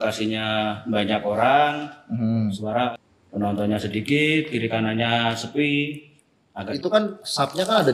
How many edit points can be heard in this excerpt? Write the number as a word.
two